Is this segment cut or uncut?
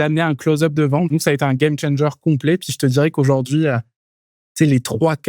cut